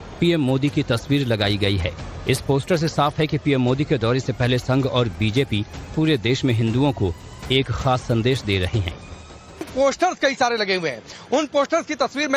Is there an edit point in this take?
no; 0 cuts

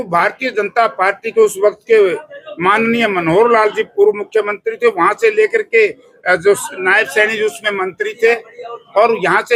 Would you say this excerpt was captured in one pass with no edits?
yes; 0 cuts

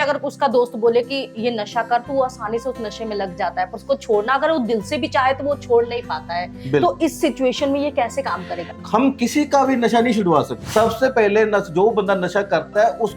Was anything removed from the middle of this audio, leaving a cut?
yes; 2 cuts; at 8.7 s, 10.6 s

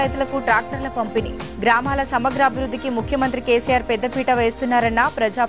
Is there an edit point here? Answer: no; 0 cuts

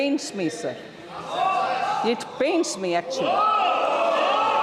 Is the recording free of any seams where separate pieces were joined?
yes; 0 cuts

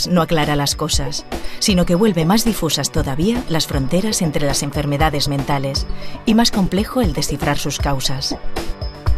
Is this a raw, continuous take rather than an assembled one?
no; 1 cut; at 1.0 s

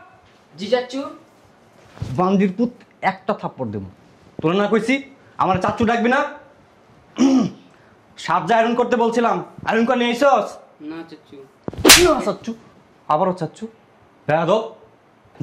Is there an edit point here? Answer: no; 0 cuts

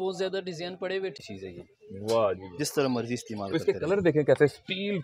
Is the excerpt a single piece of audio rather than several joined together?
no; 1 cut; at 1.2 s

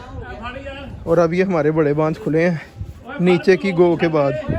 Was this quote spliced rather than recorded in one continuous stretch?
no; 0 cuts

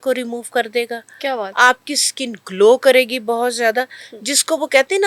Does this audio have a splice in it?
no; 0 cuts

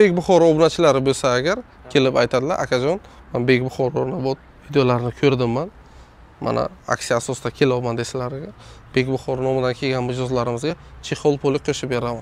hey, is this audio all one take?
yes; 0 cuts

